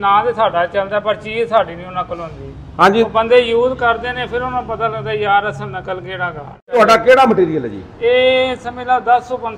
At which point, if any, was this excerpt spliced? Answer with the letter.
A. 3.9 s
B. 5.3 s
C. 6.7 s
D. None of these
C